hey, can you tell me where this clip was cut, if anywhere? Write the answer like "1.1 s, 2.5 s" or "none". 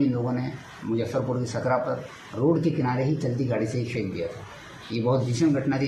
none

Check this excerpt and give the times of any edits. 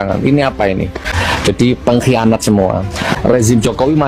1.1 s, 3.1 s

